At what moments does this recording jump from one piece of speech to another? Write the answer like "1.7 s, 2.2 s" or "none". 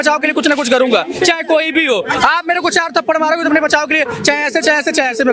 none

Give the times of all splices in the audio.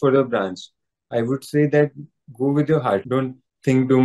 3.0 s

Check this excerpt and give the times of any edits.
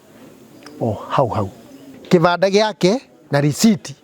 1.9 s

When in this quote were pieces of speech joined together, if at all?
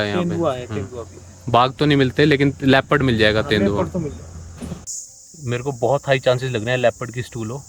4.9 s

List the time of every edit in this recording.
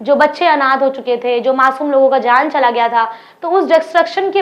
none

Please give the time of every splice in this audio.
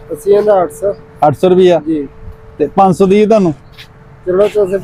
none

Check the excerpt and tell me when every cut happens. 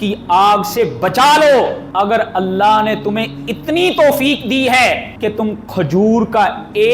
1.8 s, 5.1 s

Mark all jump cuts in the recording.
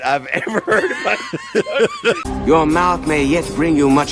2.2 s

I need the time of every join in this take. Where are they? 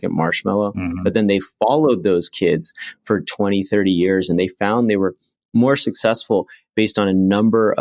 none

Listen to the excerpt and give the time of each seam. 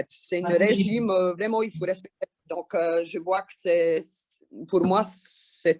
none

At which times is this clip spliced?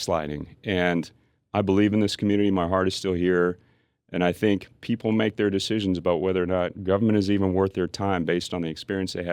none

